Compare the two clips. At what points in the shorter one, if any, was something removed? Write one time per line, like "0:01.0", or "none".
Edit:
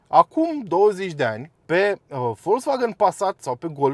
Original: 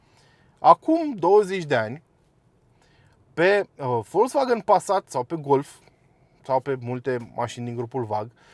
0:01.5